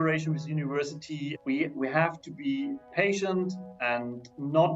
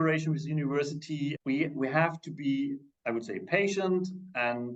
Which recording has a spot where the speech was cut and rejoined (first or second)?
first